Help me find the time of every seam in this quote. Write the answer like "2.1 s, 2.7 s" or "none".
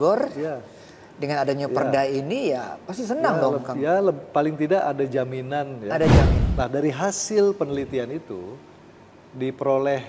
6.4 s

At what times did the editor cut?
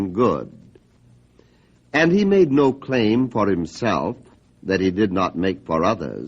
3.9 s

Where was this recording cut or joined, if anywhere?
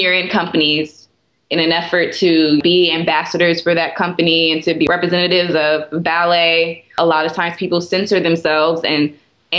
2.6 s, 4.9 s

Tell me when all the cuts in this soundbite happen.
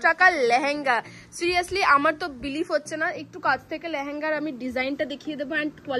none

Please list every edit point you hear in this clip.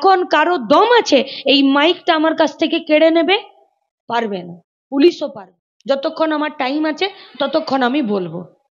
5.3 s

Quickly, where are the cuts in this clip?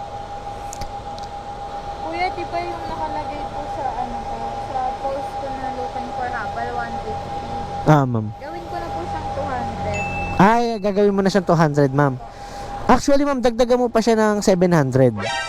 1.8 s

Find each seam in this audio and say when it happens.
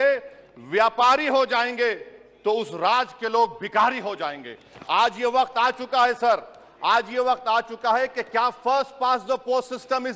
none

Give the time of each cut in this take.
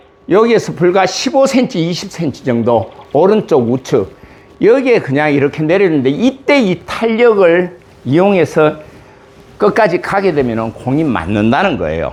none

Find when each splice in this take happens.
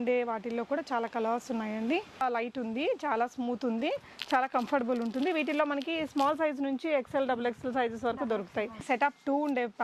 2.2 s, 8.8 s

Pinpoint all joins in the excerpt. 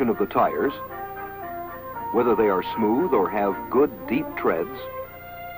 0.9 s

